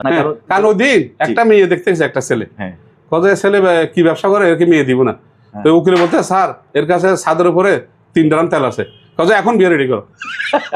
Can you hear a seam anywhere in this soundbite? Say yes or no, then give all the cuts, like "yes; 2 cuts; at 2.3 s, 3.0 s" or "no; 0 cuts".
no; 0 cuts